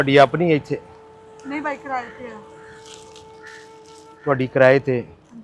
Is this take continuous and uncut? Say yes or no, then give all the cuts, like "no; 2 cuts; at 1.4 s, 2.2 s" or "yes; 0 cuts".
yes; 0 cuts